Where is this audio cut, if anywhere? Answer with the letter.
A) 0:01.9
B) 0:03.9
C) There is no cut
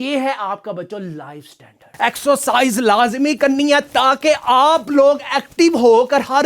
A